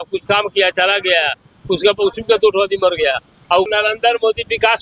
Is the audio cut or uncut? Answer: cut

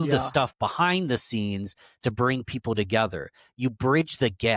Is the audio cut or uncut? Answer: uncut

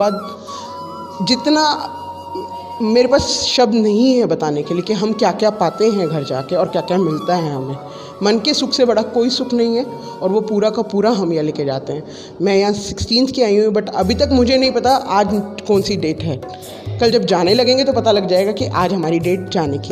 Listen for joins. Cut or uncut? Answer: uncut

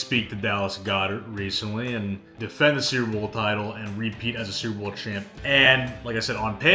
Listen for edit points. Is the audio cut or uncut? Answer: cut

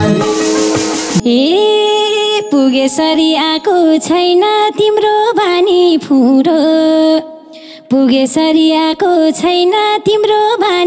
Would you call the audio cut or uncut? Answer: cut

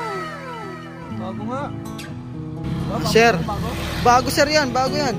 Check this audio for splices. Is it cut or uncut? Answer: uncut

